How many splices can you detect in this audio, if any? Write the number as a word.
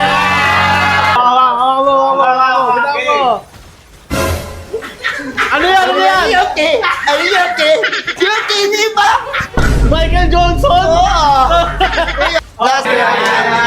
two